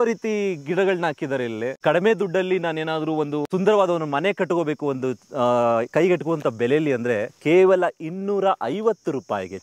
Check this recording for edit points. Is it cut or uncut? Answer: cut